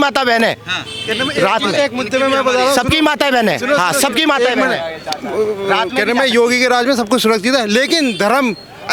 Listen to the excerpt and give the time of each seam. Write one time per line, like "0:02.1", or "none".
none